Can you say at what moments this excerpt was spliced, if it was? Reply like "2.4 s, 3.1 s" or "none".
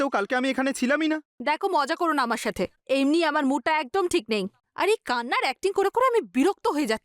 1.3 s